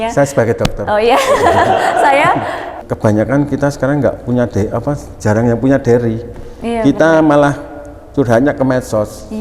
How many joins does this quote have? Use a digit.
1